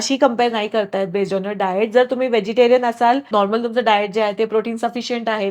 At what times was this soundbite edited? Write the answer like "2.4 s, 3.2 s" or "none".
3.2 s